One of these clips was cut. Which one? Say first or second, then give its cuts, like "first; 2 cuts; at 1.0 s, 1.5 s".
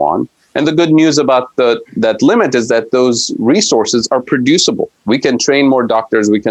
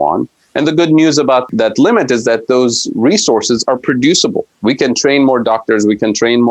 second; 1 cut; at 1.5 s